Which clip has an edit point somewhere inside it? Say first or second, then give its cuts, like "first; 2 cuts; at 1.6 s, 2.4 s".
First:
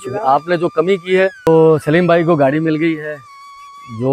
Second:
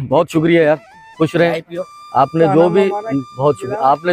first; 1 cut; at 1.5 s